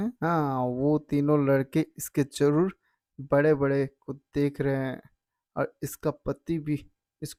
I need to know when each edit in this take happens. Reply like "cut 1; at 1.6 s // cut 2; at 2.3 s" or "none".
none